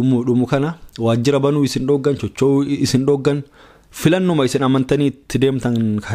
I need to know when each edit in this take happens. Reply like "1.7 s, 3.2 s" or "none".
none